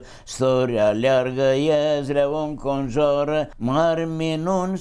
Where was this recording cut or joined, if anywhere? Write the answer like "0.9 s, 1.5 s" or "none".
3.5 s